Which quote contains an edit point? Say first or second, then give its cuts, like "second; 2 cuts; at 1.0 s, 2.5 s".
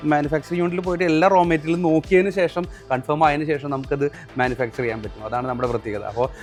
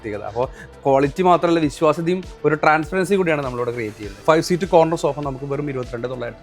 second; 1 cut; at 4.1 s